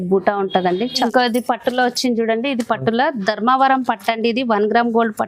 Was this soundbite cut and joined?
yes; 1 cut; at 1.0 s

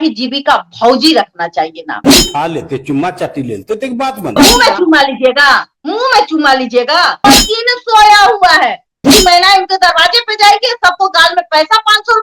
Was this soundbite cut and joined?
yes; 3 cuts; at 2.1 s, 7.2 s, 9.1 s

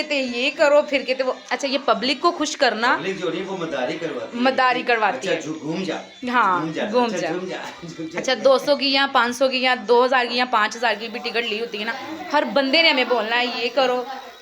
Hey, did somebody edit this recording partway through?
no; 0 cuts

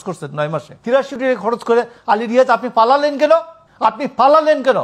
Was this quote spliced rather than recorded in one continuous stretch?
yes; 2 cuts; at 1.1 s, 3.6 s

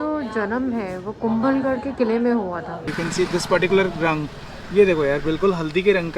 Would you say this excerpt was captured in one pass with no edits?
no; 1 cut; at 2.9 s

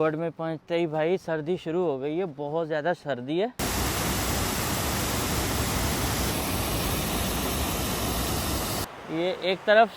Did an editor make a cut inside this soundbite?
yes; 3 cuts; at 3.6 s, 6.3 s, 8.9 s

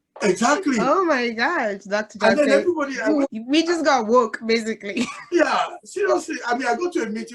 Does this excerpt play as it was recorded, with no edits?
no; 1 cut; at 3.2 s

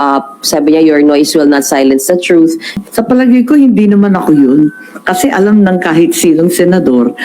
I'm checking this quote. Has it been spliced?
yes; 1 cut; at 2.8 s

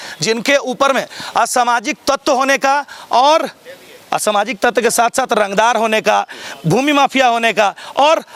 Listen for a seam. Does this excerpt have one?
no; 0 cuts

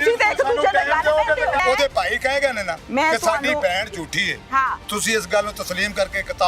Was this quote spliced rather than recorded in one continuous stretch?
yes; 2 cuts; at 1.6 s, 2.7 s

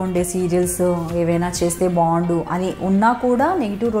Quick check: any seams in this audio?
no; 0 cuts

